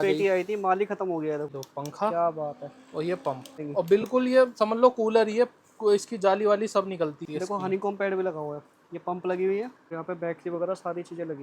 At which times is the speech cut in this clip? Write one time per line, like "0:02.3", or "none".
0:01.5
0:03.6
0:07.2
0:09.9

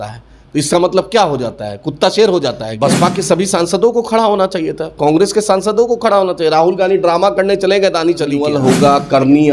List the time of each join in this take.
0:02.7
0:08.5

